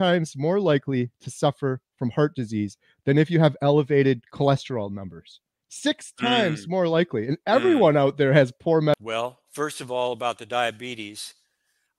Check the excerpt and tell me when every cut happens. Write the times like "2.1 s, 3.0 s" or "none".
9.0 s